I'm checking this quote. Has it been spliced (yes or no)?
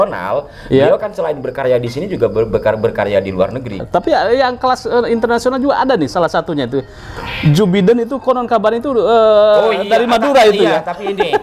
yes